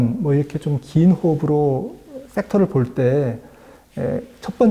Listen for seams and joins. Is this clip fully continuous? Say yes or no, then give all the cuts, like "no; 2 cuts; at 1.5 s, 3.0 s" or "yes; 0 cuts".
yes; 0 cuts